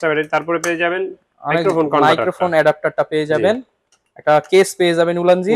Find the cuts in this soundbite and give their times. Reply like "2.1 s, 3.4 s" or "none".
none